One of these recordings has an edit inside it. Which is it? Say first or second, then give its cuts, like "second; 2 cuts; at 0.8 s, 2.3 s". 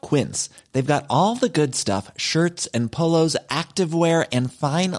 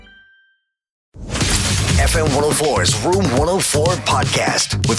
second; 1 cut; at 1.2 s